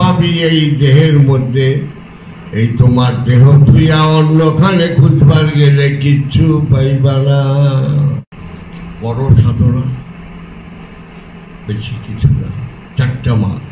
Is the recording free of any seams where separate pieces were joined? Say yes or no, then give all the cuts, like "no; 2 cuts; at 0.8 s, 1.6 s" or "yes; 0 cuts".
no; 1 cut; at 8.3 s